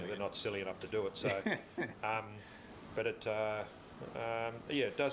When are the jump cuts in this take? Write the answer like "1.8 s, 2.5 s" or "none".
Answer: none